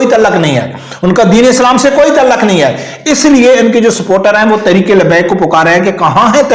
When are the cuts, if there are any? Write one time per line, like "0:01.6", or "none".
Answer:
none